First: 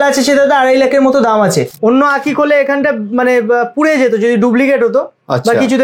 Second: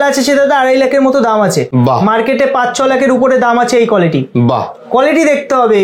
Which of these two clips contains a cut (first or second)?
first